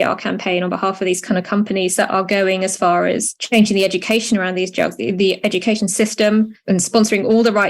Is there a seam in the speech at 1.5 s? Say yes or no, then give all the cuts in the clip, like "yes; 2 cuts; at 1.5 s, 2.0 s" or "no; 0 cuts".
no; 2 cuts; at 3.3 s, 6.6 s